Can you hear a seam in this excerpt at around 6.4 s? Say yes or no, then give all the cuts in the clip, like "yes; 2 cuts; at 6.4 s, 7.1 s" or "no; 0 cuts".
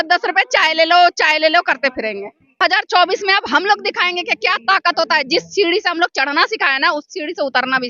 no; 1 cut; at 2.6 s